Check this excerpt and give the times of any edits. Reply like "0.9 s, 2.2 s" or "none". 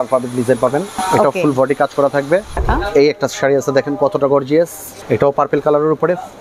1.0 s, 2.6 s, 4.9 s